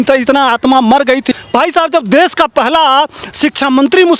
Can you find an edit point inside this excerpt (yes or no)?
yes